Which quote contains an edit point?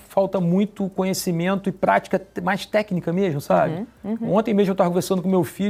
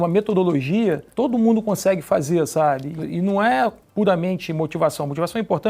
second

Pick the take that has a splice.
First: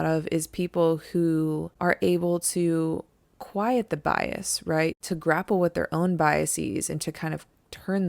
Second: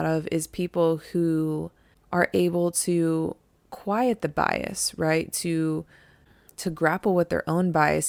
first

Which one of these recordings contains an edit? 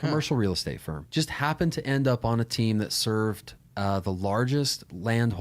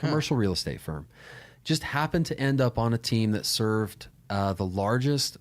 first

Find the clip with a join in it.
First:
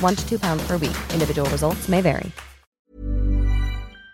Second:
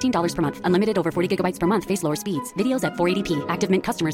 first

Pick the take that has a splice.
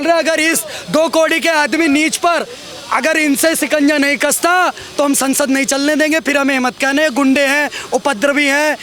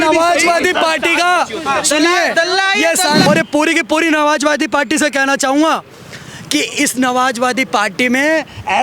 second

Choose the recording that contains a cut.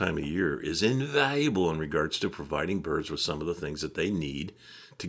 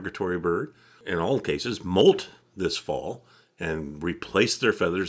second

